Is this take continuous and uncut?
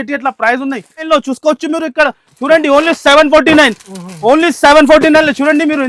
no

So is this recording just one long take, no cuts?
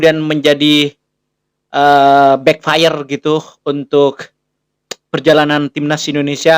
yes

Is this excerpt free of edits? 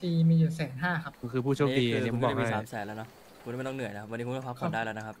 no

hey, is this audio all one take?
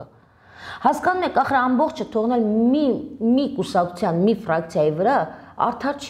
yes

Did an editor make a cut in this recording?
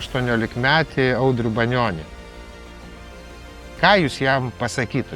no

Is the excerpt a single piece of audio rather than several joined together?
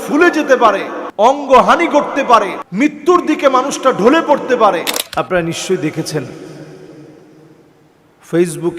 no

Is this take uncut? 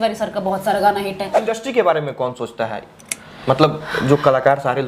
no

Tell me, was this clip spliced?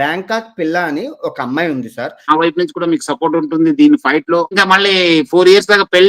yes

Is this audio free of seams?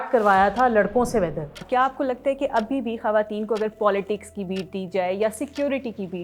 no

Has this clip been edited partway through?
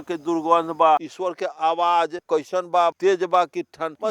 yes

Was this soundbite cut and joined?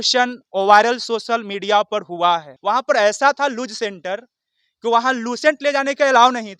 yes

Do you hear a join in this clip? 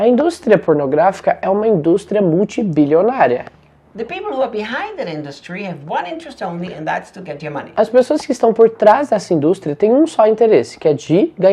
no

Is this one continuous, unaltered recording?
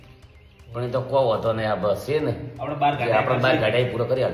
yes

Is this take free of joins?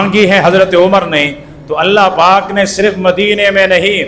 yes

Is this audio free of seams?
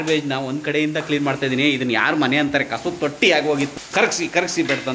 no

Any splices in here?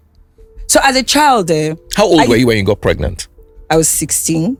no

